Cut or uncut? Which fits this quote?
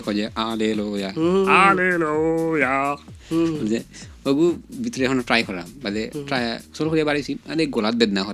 uncut